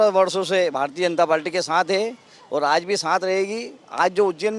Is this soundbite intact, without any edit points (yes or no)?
yes